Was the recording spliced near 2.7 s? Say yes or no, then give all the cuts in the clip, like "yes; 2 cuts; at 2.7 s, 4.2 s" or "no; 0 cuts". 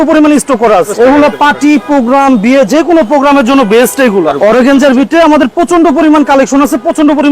no; 2 cuts; at 0.9 s, 4.3 s